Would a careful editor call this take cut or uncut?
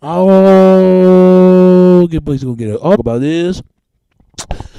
uncut